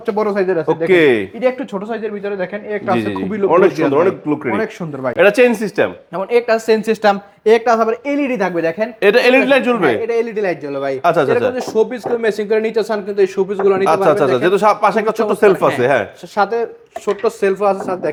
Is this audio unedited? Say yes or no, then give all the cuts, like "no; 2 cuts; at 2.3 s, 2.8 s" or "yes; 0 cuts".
yes; 0 cuts